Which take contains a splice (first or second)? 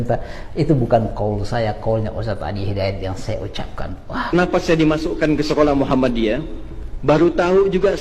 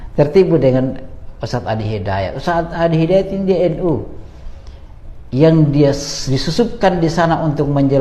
first